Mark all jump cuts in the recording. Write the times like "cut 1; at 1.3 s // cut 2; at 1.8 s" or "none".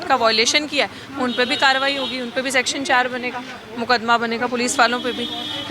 none